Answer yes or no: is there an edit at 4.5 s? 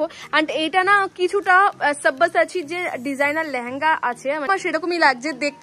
yes